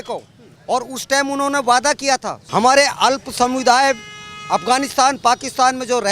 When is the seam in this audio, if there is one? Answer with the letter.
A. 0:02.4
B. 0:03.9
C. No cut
A